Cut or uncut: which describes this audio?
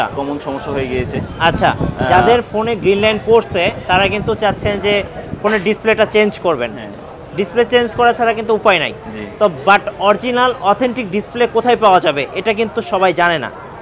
uncut